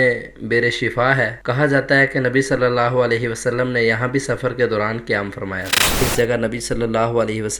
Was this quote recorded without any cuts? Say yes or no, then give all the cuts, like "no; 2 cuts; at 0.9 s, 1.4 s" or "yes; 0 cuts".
no; 1 cut; at 5.9 s